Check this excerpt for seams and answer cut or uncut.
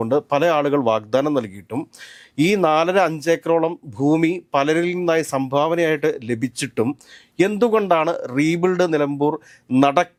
uncut